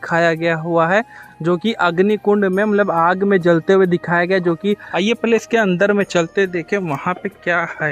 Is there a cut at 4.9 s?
yes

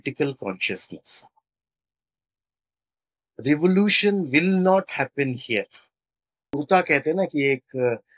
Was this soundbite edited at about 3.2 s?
no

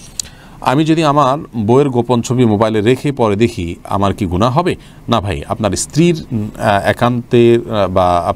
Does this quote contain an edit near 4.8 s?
no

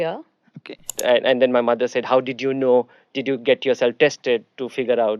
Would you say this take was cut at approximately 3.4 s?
no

